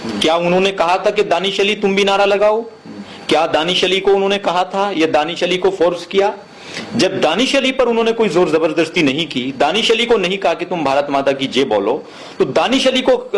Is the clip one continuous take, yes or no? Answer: yes